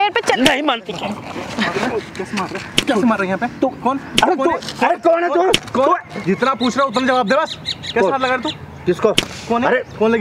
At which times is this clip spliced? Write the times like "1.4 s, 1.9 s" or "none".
none

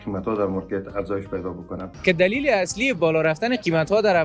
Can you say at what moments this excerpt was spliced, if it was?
1.9 s

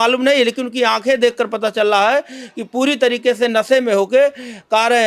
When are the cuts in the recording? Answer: none

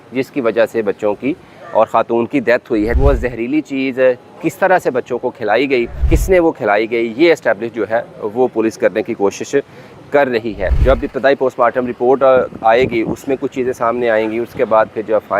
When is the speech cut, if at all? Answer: 2.9 s, 6.0 s, 10.7 s

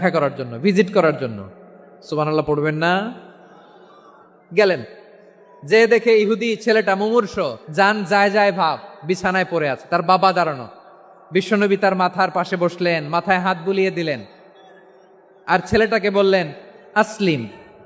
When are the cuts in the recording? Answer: 7.6 s

